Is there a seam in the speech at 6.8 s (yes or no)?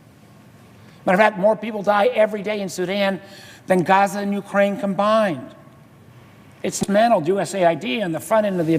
yes